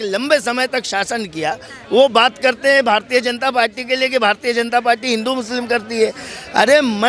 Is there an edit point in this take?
no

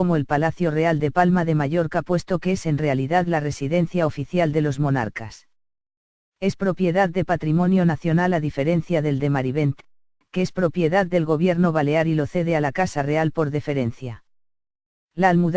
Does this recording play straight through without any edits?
yes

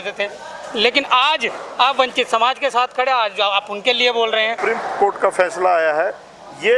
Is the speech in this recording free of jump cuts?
no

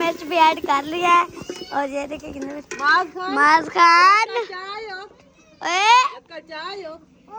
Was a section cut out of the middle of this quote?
no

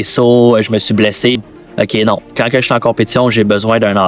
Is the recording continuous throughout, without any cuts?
no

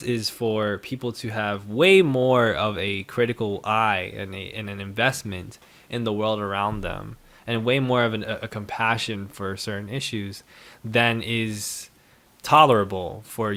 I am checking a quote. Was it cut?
no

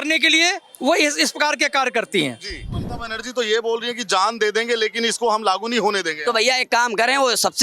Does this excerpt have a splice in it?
yes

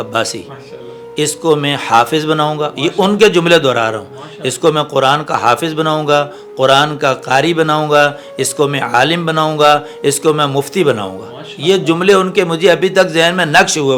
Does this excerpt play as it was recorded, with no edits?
yes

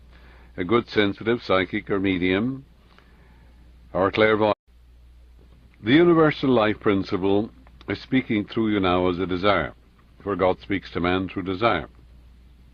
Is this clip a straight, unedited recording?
yes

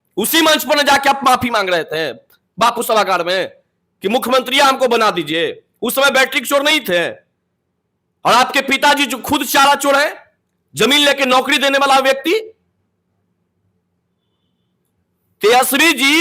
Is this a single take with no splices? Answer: yes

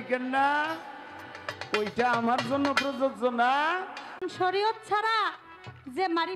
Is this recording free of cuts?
no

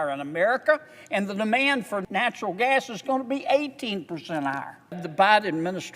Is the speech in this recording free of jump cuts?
no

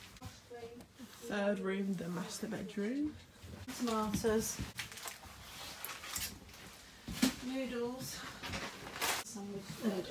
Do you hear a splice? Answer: no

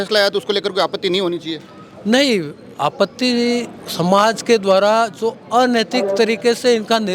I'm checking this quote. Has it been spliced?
no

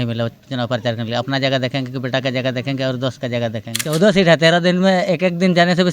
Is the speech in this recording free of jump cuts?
no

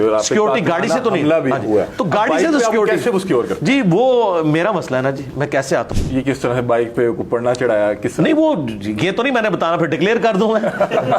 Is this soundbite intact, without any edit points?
no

